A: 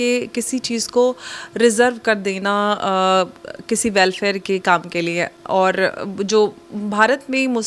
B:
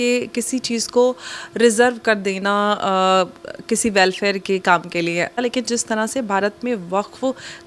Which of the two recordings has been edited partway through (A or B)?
B